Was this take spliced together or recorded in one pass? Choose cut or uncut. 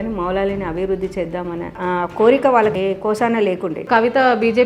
cut